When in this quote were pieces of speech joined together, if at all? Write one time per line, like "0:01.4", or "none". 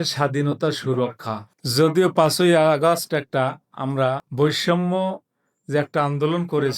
0:01.5
0:04.3